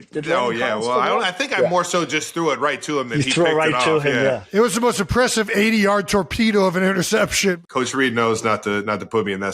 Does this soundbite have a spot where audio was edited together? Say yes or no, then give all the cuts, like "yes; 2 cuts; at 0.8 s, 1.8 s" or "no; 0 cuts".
yes; 1 cut; at 7.6 s